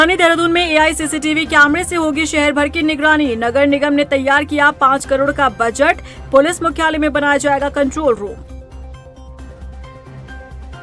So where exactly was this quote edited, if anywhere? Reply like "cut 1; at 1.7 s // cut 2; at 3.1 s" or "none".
none